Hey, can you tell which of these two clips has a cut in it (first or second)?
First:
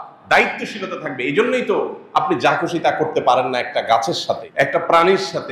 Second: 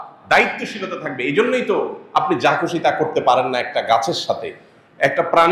first